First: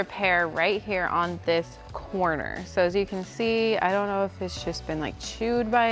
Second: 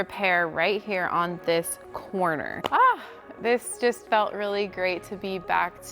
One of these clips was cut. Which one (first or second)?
second